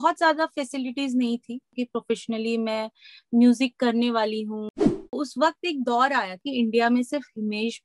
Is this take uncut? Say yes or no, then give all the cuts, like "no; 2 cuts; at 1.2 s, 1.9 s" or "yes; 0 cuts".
no; 3 cuts; at 1.7 s, 5.1 s, 6.4 s